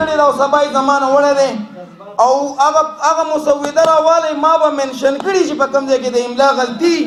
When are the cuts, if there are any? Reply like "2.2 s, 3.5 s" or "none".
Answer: none